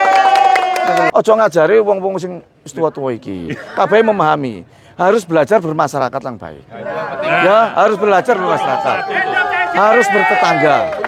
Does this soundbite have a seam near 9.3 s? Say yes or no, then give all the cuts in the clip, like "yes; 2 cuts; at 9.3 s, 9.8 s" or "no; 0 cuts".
no; 1 cut; at 1.1 s